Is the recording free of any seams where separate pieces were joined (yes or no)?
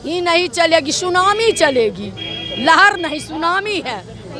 yes